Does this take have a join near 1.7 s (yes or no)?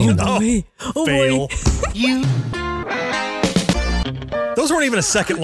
no